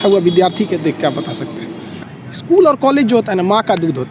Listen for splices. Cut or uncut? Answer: cut